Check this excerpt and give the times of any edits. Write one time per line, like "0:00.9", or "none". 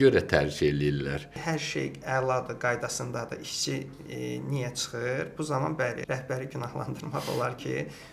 0:01.4
0:06.0